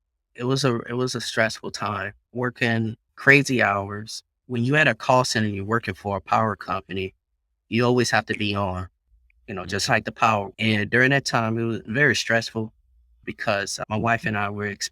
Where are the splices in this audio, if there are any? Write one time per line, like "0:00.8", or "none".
0:02.1
0:03.1
0:04.4
0:10.5
0:13.2